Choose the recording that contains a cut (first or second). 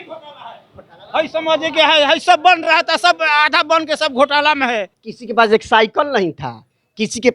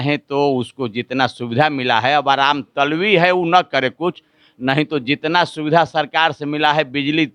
first